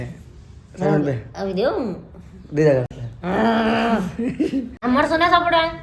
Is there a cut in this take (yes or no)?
yes